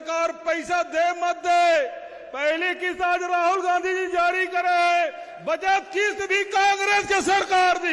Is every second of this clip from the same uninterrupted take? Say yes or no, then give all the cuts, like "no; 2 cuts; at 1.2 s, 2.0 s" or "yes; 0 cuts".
yes; 0 cuts